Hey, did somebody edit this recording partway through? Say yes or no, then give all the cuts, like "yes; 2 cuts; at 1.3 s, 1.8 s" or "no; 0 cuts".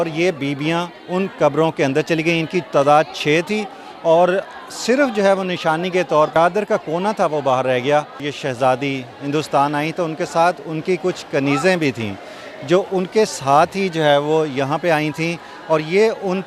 yes; 2 cuts; at 6.3 s, 8.2 s